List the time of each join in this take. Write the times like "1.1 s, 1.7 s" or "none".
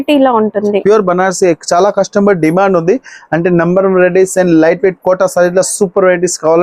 none